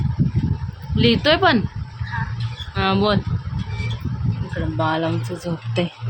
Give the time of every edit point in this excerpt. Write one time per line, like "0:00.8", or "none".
none